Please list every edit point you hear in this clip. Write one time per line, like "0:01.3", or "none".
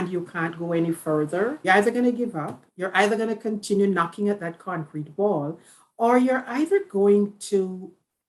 0:01.6